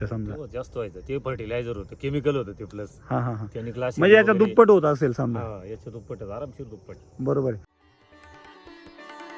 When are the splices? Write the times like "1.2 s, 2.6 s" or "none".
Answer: 7.8 s